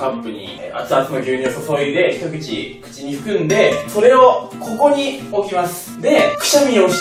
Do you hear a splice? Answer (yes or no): no